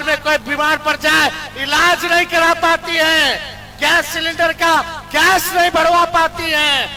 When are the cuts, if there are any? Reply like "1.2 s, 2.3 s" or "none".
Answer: none